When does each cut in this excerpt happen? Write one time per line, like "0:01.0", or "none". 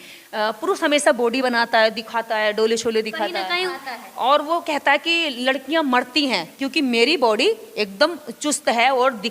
0:03.7